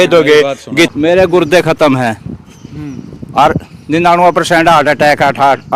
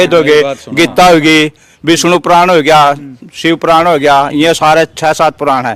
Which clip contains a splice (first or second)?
first